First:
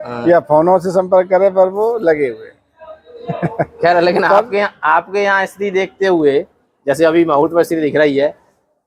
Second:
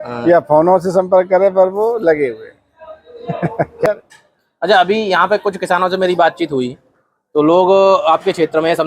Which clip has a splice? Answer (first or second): second